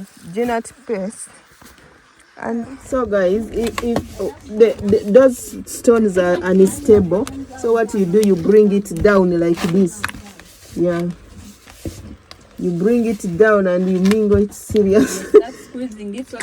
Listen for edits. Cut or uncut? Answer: cut